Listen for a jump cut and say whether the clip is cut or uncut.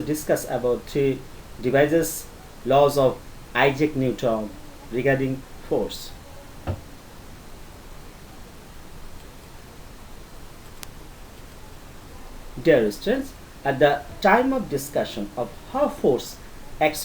cut